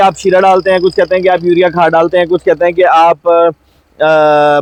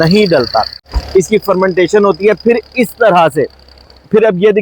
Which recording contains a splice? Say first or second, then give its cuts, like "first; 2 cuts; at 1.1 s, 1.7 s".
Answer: second; 1 cut; at 1.0 s